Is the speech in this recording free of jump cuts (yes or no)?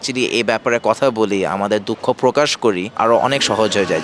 no